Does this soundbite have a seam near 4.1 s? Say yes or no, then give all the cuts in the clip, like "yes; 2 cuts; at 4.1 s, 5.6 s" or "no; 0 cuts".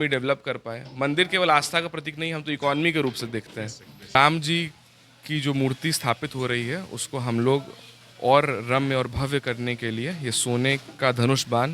yes; 1 cut; at 4.1 s